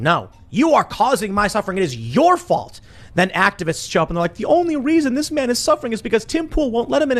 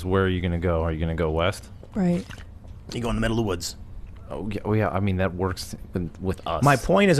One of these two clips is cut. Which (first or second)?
second